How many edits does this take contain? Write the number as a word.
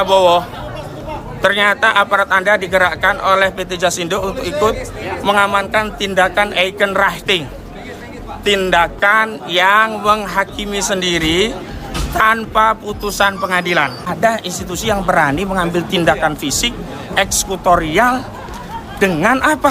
one